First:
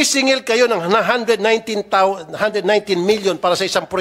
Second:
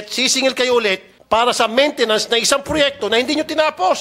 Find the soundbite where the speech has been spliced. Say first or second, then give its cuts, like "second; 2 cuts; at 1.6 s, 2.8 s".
second; 1 cut; at 1.1 s